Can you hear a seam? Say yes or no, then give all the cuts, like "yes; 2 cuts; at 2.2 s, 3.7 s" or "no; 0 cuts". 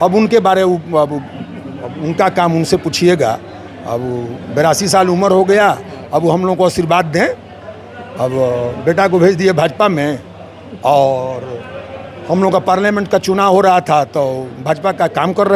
no; 0 cuts